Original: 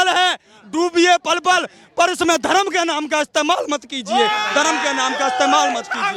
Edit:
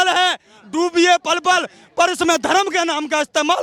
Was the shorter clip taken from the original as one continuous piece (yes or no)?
yes